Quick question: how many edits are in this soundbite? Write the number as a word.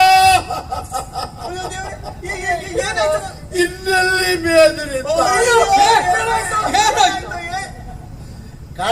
zero